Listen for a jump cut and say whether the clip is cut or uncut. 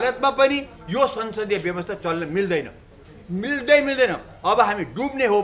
uncut